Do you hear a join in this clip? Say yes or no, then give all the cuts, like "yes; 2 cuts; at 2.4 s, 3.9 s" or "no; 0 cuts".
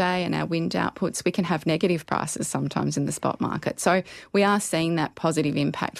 yes; 1 cut; at 4.0 s